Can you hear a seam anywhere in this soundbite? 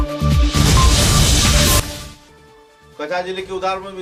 no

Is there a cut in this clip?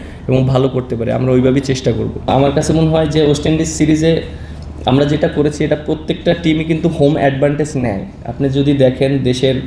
yes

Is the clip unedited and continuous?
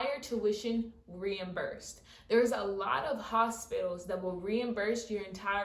yes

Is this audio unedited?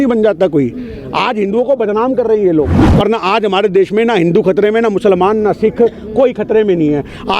no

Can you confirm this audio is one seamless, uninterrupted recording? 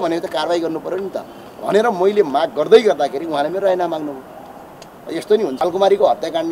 no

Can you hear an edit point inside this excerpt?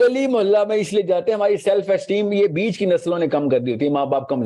no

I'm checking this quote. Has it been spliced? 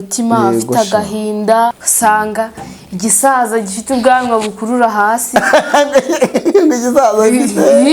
yes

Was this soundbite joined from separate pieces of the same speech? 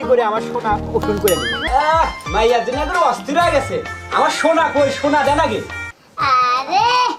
yes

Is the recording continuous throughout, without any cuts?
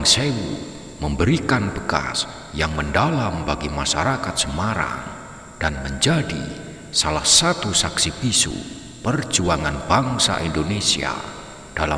yes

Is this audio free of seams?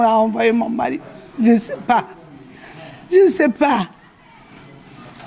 yes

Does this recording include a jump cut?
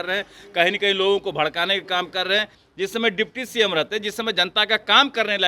yes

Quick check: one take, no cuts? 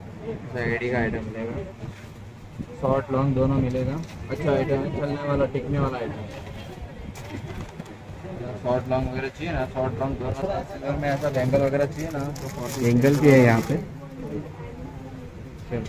no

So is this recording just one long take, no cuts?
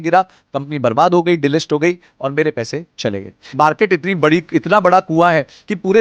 no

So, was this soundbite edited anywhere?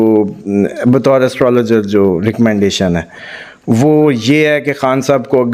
no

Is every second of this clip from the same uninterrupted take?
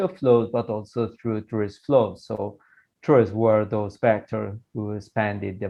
yes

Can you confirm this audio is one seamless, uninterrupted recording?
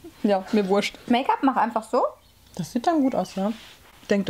no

